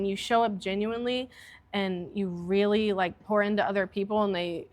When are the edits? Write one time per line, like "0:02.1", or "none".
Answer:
0:03.2

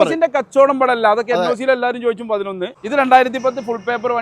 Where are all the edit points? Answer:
0:02.7

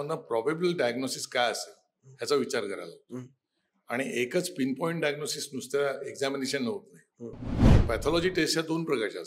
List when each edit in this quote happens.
0:07.7

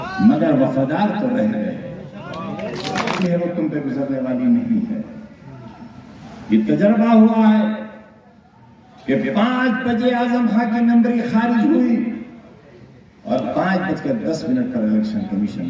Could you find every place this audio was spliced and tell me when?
0:03.2

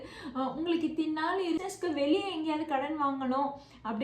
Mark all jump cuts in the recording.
0:01.6

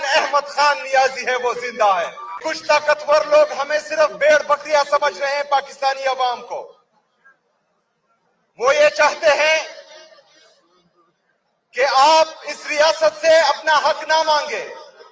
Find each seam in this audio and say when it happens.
0:02.4

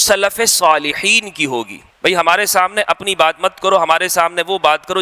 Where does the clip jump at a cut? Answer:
0:01.8

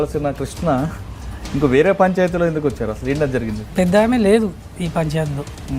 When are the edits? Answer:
0:03.7

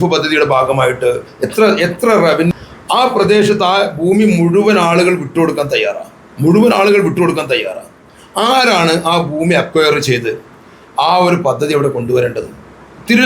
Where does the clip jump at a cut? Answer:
0:02.5

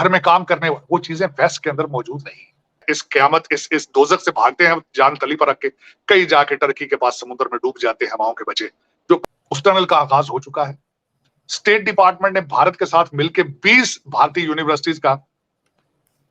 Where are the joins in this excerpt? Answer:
0:02.9
0:09.2

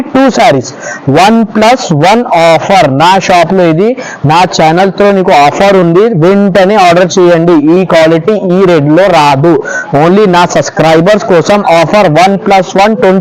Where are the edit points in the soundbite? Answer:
none

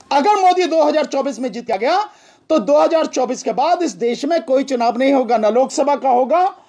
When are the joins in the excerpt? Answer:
0:01.7

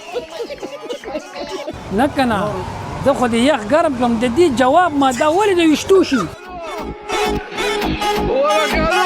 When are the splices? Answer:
0:01.7
0:06.4

